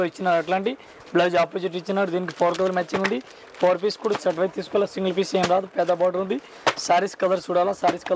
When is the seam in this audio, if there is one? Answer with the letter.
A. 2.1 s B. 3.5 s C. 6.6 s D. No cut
D